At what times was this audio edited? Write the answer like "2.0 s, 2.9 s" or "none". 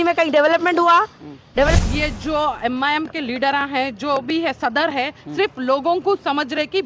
1.7 s